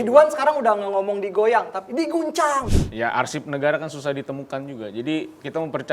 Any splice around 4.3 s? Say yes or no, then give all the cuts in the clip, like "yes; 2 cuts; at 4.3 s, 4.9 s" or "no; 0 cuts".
no; 1 cut; at 2.7 s